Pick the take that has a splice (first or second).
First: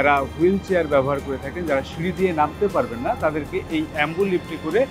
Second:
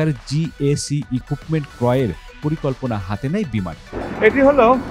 second